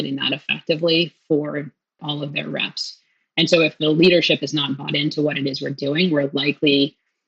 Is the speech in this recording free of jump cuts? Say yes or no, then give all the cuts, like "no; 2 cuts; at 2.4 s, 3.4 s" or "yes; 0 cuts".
no; 2 cuts; at 2.0 s, 3.7 s